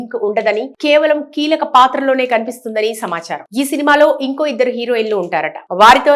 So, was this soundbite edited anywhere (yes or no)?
no